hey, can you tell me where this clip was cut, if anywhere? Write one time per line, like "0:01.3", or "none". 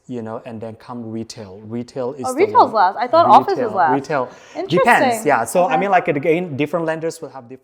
none